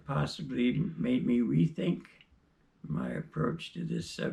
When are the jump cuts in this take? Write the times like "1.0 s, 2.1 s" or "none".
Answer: none